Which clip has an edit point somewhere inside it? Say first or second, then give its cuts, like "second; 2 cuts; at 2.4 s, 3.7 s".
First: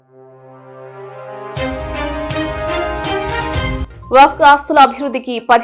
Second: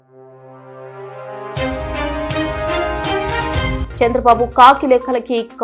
second; 1 cut; at 3.8 s